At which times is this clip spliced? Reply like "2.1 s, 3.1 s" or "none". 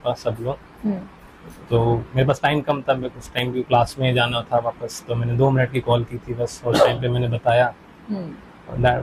none